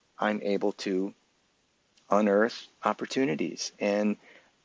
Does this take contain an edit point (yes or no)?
no